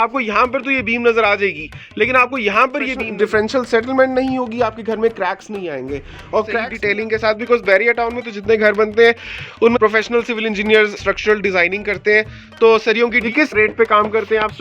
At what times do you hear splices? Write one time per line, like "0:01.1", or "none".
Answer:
0:03.1
0:06.7
0:09.8
0:13.3